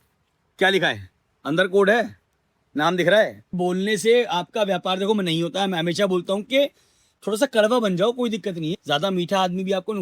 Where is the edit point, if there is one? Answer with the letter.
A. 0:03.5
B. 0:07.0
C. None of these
A